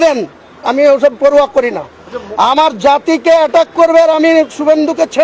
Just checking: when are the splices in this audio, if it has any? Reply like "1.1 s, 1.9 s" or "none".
none